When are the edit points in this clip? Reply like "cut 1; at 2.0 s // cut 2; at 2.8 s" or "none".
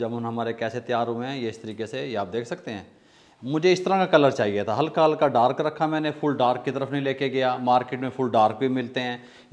none